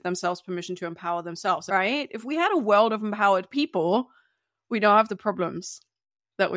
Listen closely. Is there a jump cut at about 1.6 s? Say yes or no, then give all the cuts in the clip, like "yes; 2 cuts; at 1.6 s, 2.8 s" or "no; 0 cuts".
yes; 1 cut; at 1.6 s